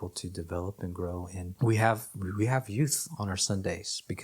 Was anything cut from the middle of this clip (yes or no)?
yes